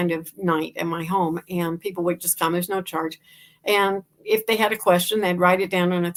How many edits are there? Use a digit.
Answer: 0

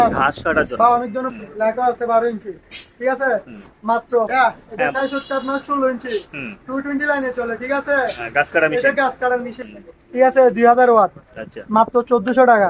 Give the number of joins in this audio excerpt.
3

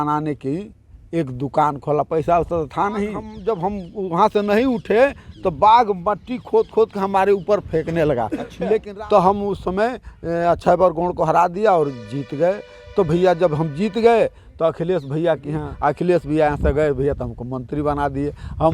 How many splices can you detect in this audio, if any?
3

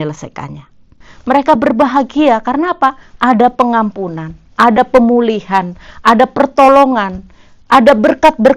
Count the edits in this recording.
1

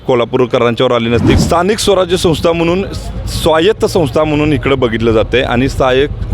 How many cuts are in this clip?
1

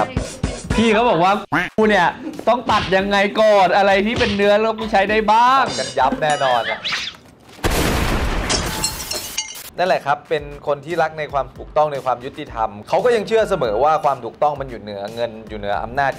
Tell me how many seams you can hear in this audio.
0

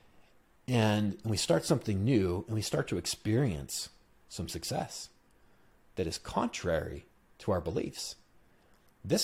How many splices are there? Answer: 0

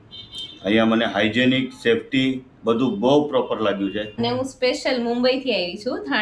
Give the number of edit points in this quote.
1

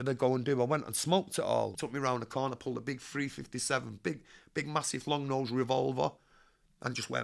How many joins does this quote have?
1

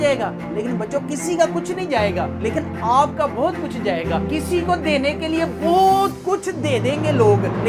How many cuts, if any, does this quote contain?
0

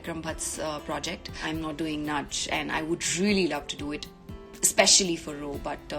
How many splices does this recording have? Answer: 1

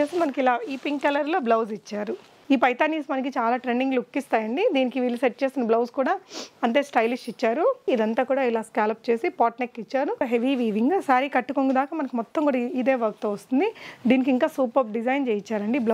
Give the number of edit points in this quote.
3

